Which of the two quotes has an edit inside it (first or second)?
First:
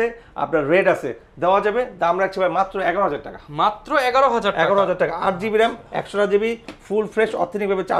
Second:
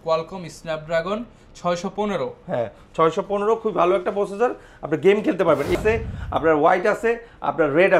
second